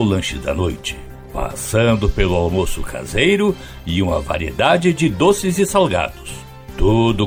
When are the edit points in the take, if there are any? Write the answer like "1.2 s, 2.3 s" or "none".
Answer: none